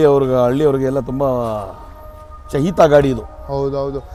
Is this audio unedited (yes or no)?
yes